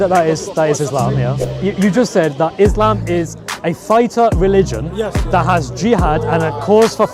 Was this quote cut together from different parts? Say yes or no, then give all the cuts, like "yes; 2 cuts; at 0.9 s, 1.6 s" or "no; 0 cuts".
yes; 1 cut; at 1.4 s